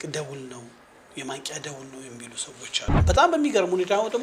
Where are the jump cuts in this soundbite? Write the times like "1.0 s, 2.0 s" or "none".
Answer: 3.0 s